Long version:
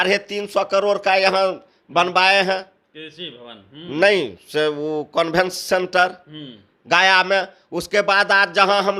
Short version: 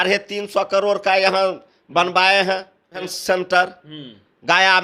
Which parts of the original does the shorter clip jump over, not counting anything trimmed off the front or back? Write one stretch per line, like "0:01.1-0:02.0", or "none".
0:03.1-0:05.6